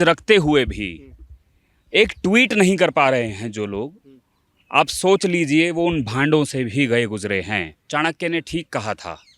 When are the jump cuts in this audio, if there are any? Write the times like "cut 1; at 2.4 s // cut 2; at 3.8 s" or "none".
cut 1; at 7.8 s